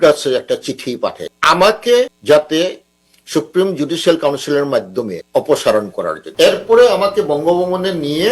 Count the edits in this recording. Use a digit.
4